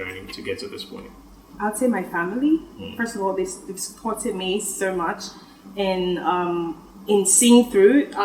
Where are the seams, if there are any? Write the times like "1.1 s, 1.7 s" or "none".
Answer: 1.5 s